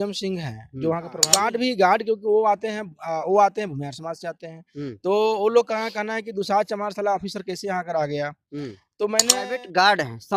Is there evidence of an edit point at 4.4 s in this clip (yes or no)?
no